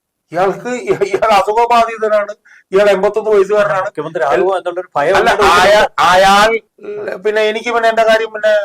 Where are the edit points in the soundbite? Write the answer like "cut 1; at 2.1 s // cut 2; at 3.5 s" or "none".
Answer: cut 1; at 6.7 s